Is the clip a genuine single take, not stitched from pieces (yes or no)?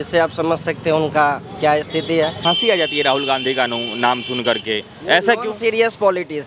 no